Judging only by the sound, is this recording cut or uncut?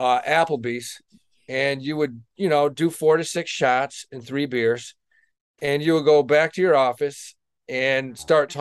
uncut